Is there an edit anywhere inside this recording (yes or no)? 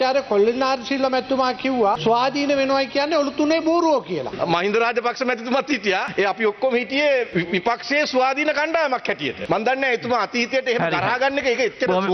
yes